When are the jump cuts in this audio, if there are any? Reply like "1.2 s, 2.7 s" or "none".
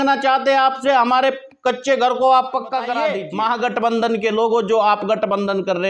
3.0 s